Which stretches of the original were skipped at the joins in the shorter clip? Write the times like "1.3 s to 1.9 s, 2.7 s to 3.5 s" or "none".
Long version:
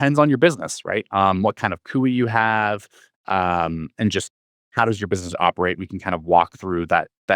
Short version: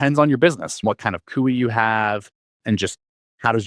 0.8 s to 1.4 s, 3.1 s to 3.9 s